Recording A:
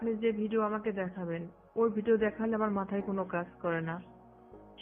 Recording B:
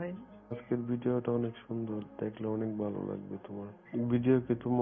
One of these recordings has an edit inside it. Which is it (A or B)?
B